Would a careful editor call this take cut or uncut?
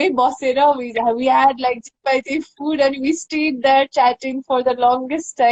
uncut